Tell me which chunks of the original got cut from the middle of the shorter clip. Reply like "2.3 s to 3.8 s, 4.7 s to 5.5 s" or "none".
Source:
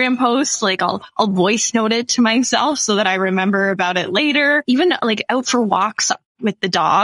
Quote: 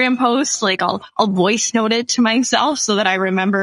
none

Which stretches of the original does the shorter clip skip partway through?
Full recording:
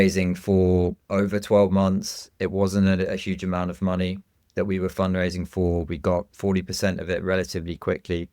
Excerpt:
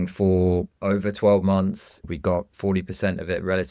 2.3 s to 5.8 s

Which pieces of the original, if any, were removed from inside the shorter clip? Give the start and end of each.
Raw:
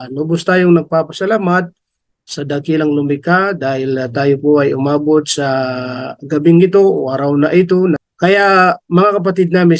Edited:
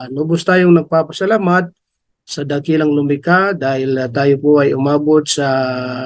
none

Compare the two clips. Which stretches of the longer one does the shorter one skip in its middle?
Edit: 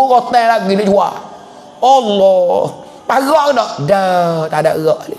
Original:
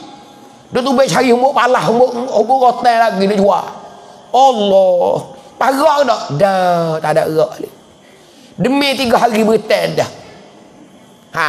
none

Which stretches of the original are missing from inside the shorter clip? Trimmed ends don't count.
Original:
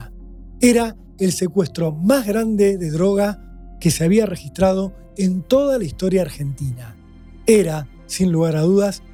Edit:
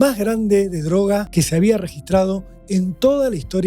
3.4 s to 3.8 s

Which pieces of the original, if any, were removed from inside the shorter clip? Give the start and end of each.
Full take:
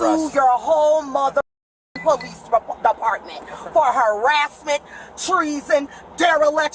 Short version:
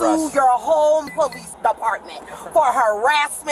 1.1 s to 2.3 s

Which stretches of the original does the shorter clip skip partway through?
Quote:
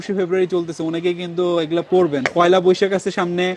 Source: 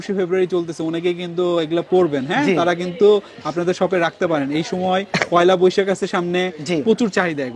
2.3 s to 5.2 s

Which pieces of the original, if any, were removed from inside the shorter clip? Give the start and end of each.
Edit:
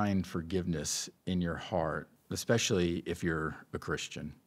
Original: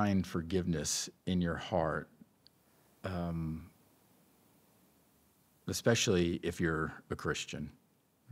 2.1 s to 5.5 s

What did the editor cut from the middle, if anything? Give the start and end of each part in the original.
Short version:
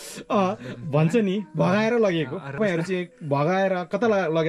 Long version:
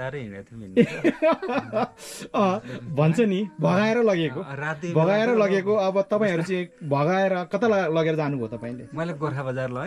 4.6 s to 6.2 s

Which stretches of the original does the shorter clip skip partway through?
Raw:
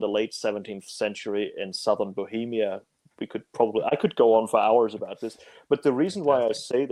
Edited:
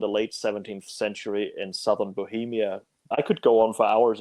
3.1 s to 3.8 s

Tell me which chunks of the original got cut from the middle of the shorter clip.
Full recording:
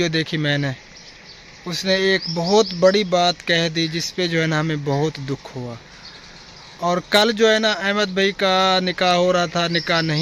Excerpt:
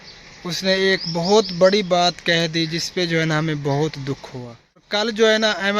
6.1 s to 7.1 s

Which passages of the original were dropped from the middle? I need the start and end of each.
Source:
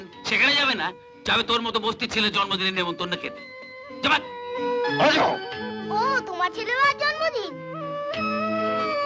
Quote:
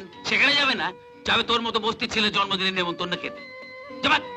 none

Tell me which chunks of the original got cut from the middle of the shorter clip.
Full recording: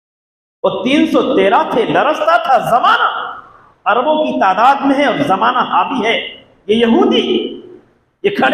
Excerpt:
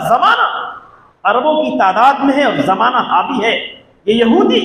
none

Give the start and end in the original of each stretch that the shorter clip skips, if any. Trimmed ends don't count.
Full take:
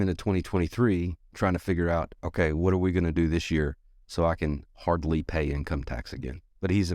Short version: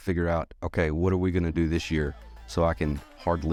none

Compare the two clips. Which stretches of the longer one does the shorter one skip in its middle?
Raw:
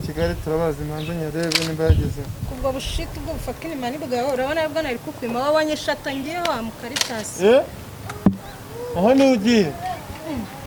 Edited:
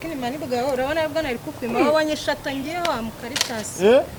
none

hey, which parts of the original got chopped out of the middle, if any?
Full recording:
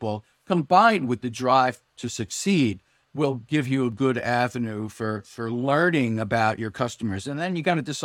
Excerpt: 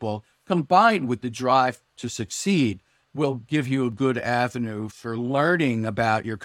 4.9 s to 5.3 s

